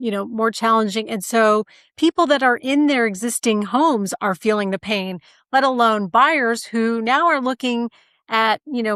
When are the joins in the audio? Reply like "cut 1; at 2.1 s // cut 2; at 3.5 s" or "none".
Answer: none